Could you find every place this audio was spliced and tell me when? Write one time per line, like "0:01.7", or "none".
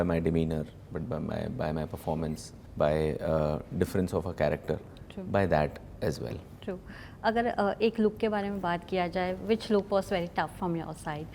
none